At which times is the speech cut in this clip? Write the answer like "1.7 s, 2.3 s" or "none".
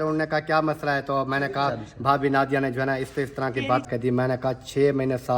3.9 s